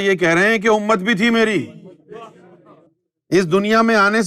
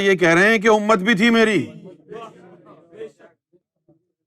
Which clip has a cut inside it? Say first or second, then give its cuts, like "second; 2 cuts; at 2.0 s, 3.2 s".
first; 1 cut; at 2.8 s